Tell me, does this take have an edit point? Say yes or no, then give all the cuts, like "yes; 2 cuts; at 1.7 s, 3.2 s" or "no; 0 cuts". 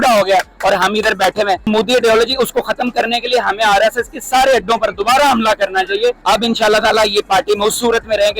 yes; 2 cuts; at 1.7 s, 6.2 s